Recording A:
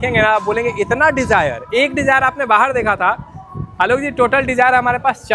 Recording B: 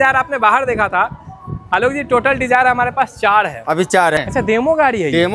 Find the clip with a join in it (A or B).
B